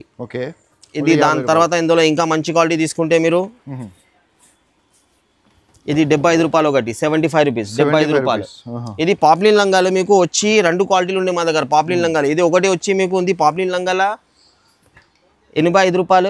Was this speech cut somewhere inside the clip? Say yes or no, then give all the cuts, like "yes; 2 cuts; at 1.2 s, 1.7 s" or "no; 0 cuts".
no; 0 cuts